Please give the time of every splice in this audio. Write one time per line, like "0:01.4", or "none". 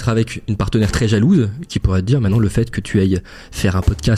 none